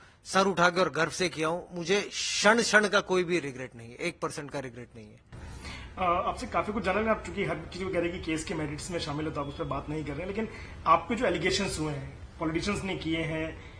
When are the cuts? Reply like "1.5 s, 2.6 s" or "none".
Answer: none